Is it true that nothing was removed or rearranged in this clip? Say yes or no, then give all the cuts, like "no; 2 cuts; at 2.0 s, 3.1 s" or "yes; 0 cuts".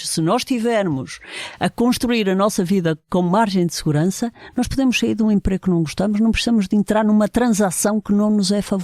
yes; 0 cuts